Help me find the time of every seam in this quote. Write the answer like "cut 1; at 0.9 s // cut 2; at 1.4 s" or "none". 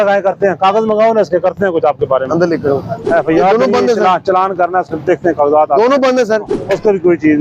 cut 1; at 2.9 s // cut 2; at 6.5 s